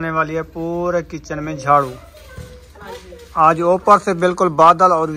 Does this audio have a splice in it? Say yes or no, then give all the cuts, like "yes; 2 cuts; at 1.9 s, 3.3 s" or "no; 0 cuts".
no; 0 cuts